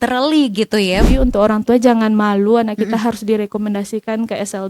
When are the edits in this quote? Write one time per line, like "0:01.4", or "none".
0:01.0